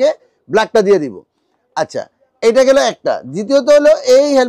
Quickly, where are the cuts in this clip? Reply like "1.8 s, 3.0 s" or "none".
none

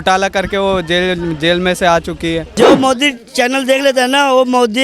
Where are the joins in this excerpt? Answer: 2.5 s

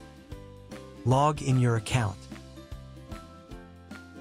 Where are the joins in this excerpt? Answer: 1.0 s, 2.1 s

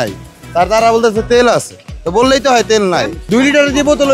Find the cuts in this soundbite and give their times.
none

